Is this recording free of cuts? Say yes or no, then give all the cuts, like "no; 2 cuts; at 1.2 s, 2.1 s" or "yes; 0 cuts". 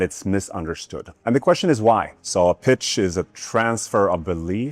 no; 1 cut; at 2.2 s